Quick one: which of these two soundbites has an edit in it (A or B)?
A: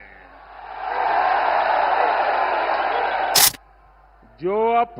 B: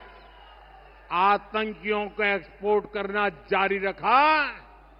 A